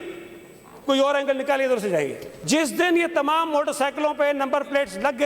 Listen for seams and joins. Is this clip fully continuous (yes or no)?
no